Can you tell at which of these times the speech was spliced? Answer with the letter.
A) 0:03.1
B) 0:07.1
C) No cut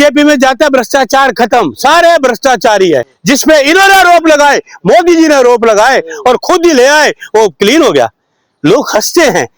A